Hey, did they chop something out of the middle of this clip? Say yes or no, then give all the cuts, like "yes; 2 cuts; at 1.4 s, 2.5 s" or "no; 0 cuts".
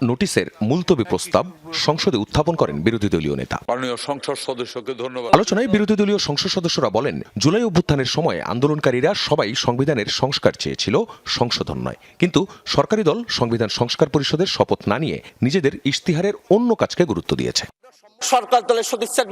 yes; 1 cut; at 3.6 s